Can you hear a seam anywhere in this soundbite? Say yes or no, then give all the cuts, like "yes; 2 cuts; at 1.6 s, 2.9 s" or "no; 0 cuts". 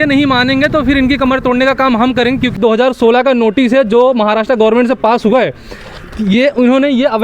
yes; 1 cut; at 2.6 s